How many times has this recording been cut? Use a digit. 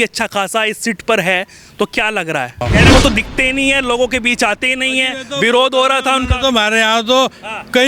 1